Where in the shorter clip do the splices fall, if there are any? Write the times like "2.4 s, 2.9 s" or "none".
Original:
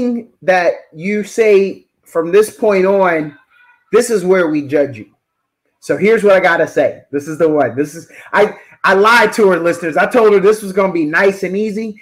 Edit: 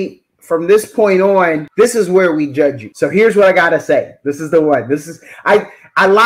1.6 s, 2.9 s